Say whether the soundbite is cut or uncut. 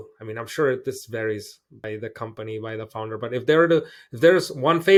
uncut